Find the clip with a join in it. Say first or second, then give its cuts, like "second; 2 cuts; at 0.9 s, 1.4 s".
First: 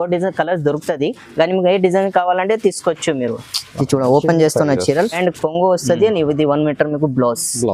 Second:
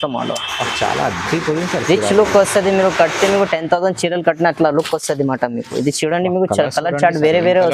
first; 1 cut; at 5.2 s